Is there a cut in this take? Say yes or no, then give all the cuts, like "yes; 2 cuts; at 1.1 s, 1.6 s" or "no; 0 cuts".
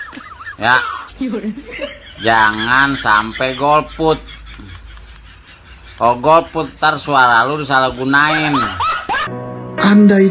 yes; 1 cut; at 9.3 s